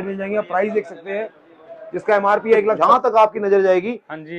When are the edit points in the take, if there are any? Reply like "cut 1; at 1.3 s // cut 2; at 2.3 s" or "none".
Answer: cut 1; at 2.8 s

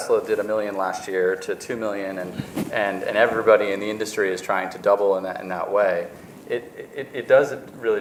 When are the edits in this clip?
none

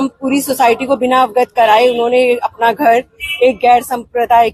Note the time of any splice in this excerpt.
none

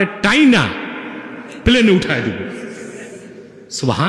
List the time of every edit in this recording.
none

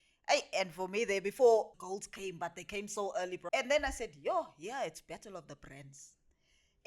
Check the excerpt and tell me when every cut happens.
cut 1; at 1.8 s // cut 2; at 3.4 s

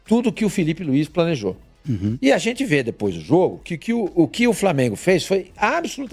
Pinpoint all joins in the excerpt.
none

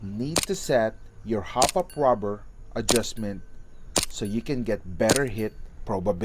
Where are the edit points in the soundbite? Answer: none

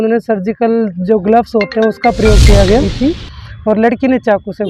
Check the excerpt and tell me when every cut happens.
cut 1; at 2.6 s

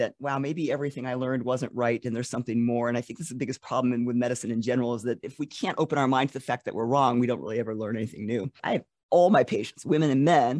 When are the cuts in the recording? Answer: cut 1; at 5.4 s // cut 2; at 8.6 s

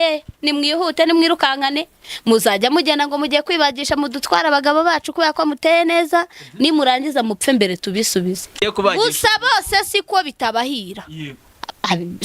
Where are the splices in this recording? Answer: cut 1; at 8.6 s

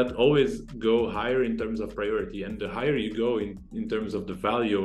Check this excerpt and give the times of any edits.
none

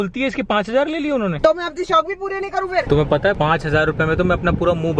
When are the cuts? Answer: cut 1; at 1.3 s // cut 2; at 2.9 s

